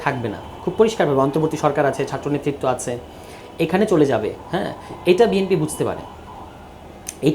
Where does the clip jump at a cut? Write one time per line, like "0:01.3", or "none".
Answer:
none